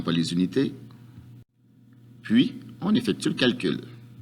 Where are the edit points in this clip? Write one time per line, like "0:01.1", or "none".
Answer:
0:03.2